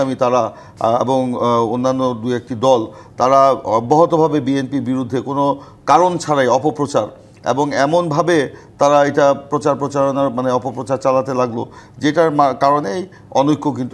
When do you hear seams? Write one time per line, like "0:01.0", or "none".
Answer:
none